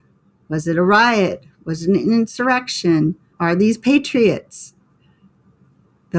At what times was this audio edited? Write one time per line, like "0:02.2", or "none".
0:03.3